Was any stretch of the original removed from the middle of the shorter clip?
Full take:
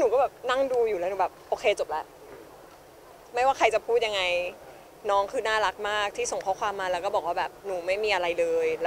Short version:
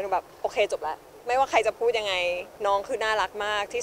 yes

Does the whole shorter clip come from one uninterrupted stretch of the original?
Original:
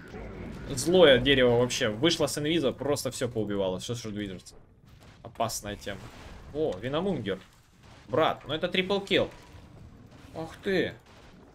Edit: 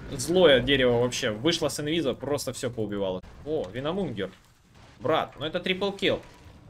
no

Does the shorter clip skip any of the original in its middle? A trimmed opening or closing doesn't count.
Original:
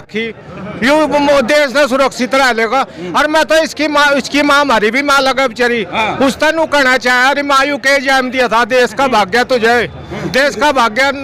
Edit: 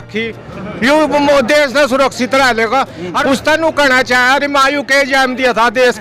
yes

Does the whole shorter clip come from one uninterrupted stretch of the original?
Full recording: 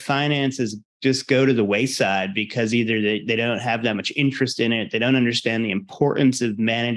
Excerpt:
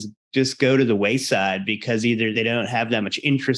no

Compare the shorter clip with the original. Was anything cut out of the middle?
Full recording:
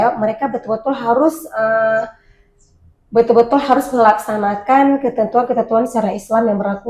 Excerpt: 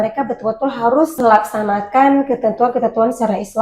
yes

